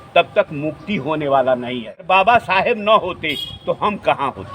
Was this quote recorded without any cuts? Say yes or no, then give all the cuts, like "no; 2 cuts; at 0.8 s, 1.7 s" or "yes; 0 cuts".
no; 1 cut; at 2.0 s